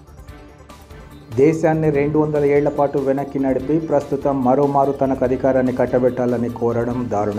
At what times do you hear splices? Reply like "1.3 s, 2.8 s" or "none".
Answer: 0.9 s